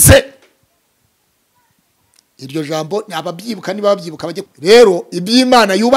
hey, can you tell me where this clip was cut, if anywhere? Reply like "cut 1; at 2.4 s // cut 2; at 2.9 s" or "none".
cut 1; at 4.4 s